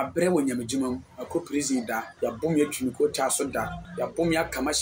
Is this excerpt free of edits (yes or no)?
no